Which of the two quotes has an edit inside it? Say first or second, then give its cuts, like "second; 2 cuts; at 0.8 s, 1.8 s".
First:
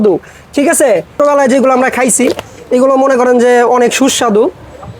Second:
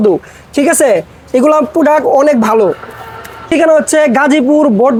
first; 1 cut; at 1.2 s